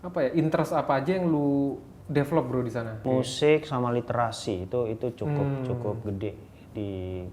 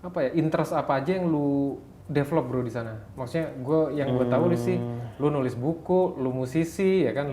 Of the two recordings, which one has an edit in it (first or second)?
first